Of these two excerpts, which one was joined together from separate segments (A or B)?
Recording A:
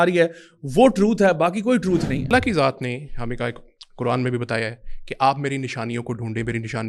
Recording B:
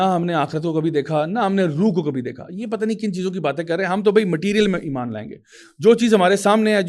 A